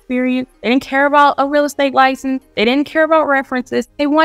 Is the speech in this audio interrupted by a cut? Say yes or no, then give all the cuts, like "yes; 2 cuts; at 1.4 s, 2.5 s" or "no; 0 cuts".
no; 0 cuts